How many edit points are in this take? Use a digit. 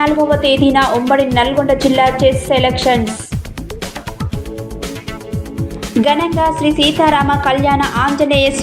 0